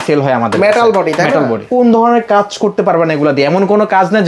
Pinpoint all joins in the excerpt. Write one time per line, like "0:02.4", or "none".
0:01.7

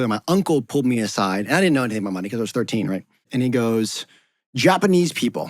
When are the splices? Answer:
0:03.3

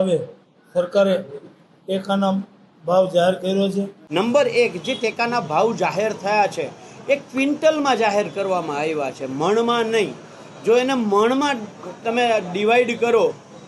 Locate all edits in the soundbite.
0:04.0

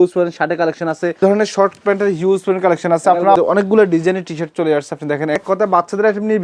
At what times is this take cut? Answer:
0:01.2
0:03.4
0:05.4

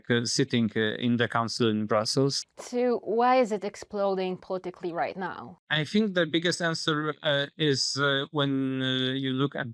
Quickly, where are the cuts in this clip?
0:02.4

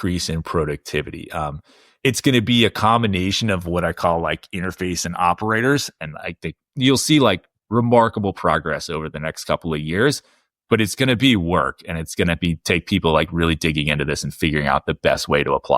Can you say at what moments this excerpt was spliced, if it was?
0:06.0

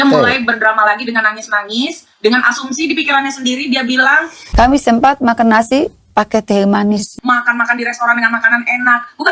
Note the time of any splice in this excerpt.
0:04.6
0:07.1

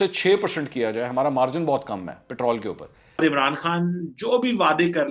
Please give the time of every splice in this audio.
0:03.2

